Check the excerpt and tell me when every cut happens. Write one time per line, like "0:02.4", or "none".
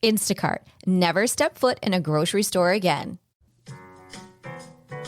0:03.3